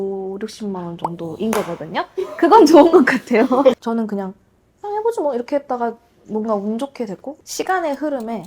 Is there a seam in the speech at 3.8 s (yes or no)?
yes